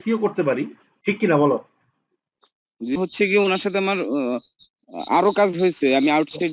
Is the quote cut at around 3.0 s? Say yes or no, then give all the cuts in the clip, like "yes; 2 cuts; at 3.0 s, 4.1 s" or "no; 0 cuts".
yes; 1 cut; at 3.0 s